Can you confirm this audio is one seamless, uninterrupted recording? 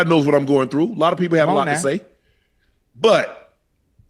yes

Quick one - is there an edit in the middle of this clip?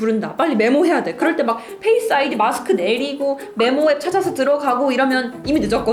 no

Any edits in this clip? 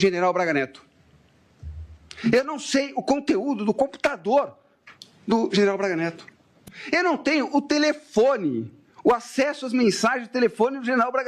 no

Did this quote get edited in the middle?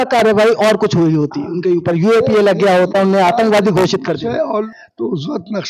yes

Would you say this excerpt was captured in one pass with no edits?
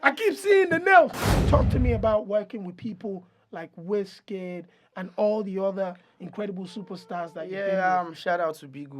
no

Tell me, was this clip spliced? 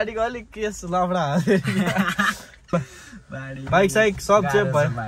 yes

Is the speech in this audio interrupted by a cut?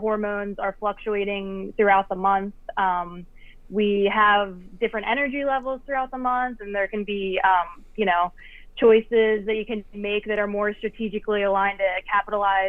no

